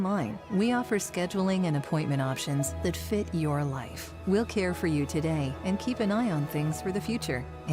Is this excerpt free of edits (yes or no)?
yes